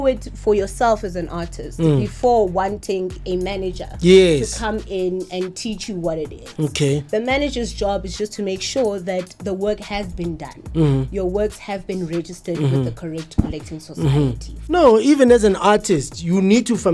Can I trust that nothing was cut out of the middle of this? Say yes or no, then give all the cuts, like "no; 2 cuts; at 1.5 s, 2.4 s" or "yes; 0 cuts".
no; 1 cut; at 14.5 s